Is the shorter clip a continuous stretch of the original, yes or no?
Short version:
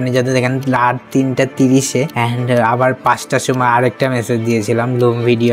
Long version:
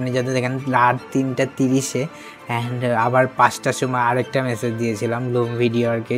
no